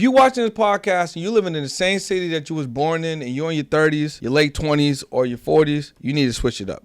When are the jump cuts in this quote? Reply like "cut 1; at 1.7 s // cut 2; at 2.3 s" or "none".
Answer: cut 1; at 4.2 s // cut 2; at 5.9 s